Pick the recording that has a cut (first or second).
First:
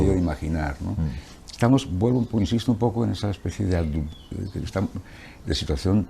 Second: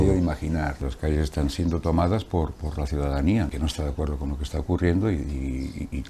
second